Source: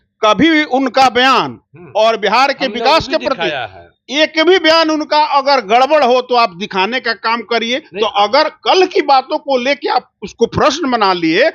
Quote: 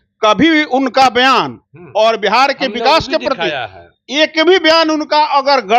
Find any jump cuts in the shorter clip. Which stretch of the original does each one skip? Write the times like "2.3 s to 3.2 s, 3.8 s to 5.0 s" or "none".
none